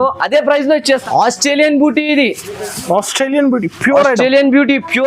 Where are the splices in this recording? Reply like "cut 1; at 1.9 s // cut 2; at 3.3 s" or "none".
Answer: cut 1; at 1.0 s